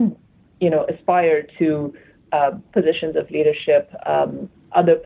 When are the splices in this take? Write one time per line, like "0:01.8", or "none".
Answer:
none